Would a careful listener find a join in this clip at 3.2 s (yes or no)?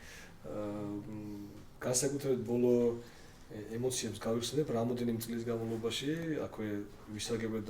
no